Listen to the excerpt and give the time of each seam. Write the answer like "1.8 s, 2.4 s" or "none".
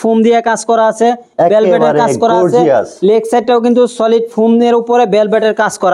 none